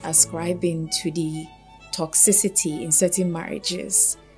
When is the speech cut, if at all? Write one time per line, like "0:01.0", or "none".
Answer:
none